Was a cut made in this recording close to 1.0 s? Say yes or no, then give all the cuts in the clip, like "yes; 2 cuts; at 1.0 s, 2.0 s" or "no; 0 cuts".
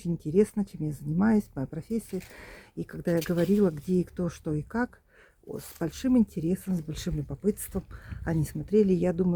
no; 0 cuts